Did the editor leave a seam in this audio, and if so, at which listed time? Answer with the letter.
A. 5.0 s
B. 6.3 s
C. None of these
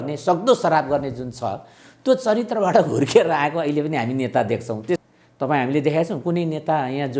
A